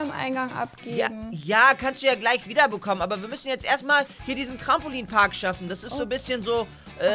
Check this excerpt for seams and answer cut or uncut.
uncut